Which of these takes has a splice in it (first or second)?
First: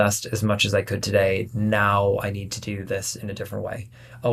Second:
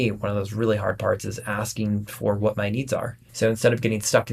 second